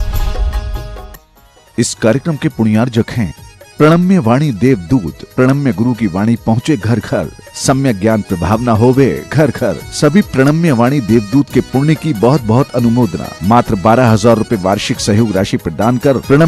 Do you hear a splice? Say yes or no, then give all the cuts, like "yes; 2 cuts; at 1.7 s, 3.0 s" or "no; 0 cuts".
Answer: no; 0 cuts